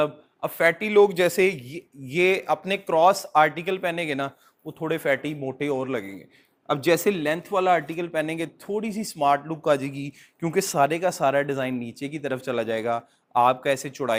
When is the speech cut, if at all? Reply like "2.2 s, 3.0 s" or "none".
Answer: none